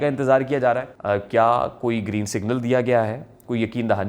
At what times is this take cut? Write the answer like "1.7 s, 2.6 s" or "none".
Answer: 0.9 s